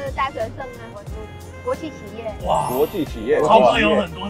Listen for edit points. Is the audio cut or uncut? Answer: cut